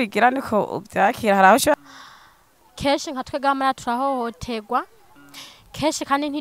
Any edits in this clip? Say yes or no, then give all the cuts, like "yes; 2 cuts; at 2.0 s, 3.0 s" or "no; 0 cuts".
yes; 1 cut; at 1.7 s